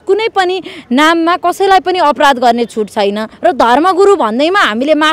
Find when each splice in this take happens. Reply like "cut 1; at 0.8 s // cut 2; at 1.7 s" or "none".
cut 1; at 3.3 s